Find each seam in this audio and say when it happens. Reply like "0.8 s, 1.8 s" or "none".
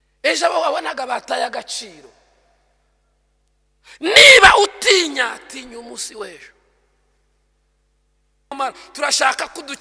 8.5 s